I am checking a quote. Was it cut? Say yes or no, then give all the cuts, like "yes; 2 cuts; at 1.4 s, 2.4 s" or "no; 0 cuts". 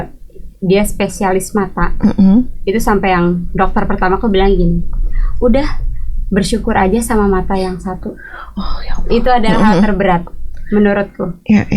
no; 0 cuts